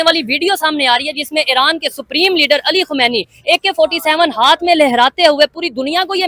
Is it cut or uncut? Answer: uncut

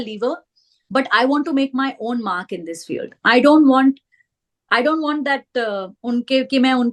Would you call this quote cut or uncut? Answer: uncut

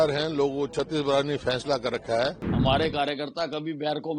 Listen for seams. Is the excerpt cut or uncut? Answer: cut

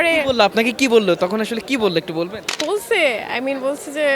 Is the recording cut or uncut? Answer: cut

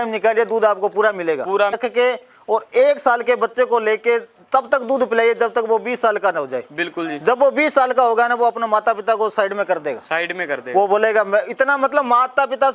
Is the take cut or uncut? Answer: cut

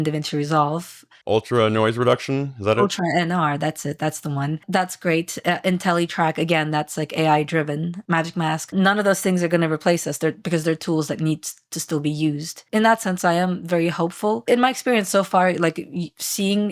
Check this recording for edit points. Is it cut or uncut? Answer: uncut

